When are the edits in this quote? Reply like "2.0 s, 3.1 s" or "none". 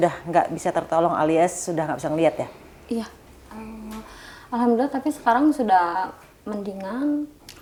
none